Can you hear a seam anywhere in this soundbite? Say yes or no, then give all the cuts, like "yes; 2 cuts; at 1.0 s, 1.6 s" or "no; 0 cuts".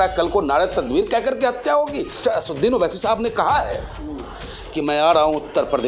yes; 1 cut; at 2.2 s